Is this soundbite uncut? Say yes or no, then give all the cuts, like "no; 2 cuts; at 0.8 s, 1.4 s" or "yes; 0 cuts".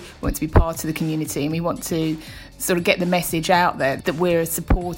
no; 1 cut; at 4.0 s